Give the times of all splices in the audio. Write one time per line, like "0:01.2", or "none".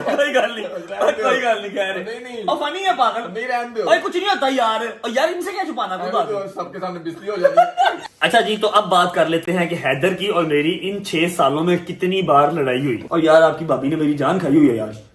0:08.1
0:13.0